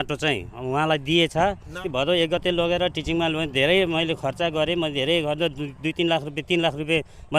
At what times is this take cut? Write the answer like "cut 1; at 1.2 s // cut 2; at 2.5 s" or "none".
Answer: cut 1; at 1.8 s